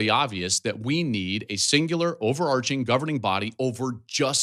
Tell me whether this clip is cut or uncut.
uncut